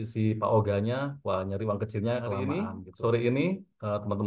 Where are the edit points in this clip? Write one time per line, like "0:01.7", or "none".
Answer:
0:02.6